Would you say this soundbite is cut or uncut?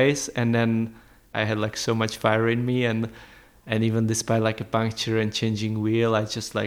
cut